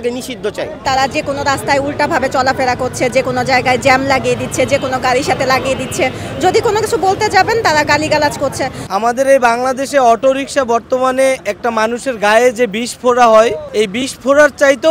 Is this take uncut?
no; 3 cuts; at 0.8 s, 8.8 s, 13.6 s

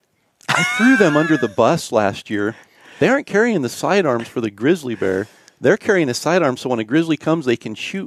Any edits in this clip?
no; 0 cuts

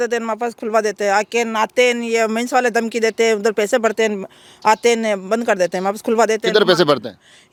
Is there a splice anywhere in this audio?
no; 0 cuts

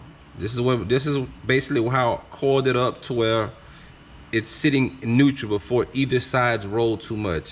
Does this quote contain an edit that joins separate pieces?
no; 0 cuts

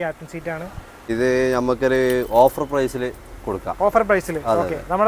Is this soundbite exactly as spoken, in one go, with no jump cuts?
no; 1 cut; at 1.1 s

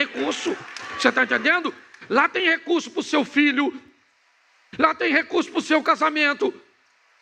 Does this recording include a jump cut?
no; 0 cuts

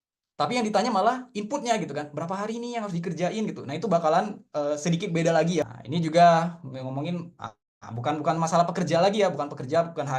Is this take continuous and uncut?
no; 1 cut; at 5.6 s

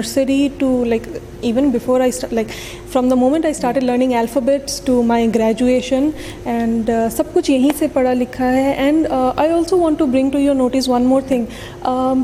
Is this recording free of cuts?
yes; 0 cuts

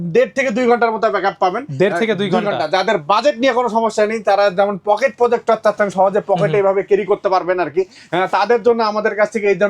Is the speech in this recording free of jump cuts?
yes; 0 cuts

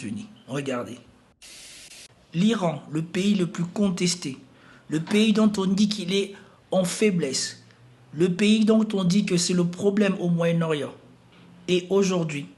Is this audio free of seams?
no; 1 cut; at 1.6 s

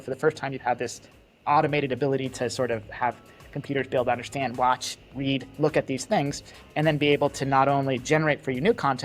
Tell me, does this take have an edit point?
no; 0 cuts

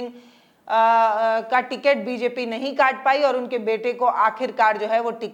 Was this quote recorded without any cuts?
yes; 0 cuts

